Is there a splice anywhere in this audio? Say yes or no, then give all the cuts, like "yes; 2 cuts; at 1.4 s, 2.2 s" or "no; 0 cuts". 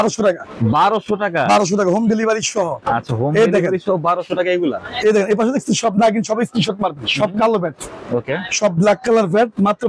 no; 0 cuts